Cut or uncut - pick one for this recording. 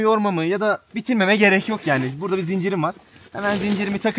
uncut